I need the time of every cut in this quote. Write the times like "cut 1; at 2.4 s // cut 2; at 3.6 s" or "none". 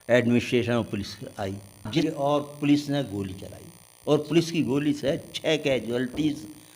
cut 1; at 1.9 s